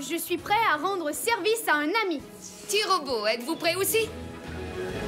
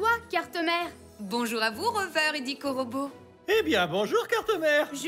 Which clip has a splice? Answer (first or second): first